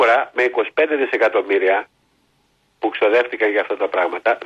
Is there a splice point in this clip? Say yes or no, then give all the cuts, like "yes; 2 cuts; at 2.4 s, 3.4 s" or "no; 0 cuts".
no; 0 cuts